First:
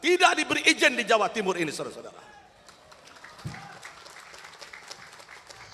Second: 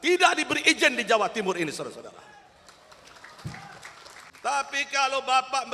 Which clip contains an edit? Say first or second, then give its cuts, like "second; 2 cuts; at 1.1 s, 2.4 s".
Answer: second; 1 cut; at 4.3 s